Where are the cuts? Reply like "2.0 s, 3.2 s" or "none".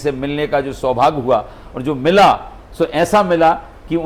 none